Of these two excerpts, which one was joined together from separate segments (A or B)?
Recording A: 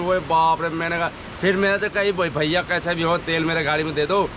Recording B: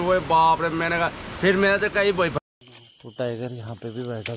B